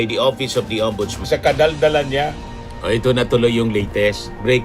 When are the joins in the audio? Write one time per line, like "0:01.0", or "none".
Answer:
0:01.2